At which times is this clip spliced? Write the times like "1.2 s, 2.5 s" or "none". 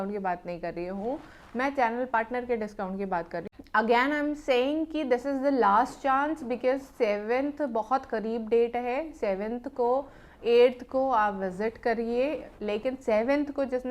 3.4 s